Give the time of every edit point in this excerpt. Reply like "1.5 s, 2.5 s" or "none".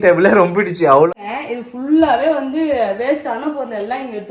1.1 s